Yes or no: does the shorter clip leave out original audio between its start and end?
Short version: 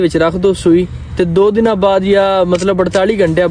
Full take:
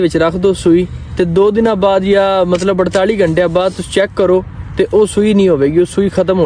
no